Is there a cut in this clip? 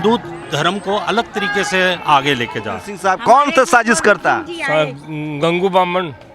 yes; 1 cut; at 2.9 s

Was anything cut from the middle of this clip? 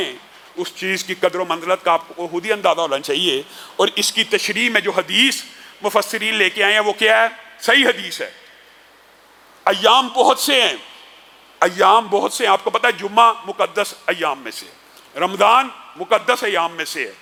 no; 0 cuts

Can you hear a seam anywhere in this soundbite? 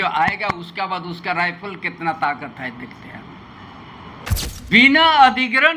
yes; 1 cut; at 4.3 s

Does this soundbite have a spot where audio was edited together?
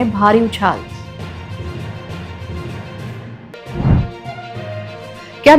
no; 0 cuts

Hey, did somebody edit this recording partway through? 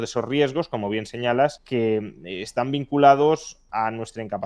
yes; 1 cut; at 1.6 s

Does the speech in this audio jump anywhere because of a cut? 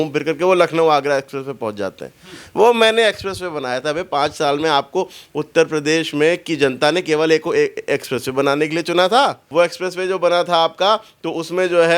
yes; 1 cut; at 9.4 s

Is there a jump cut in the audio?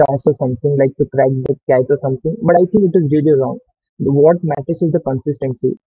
no; 0 cuts

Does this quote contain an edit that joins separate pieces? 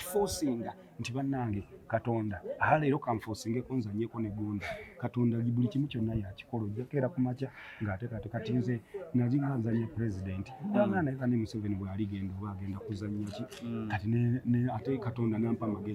no; 0 cuts

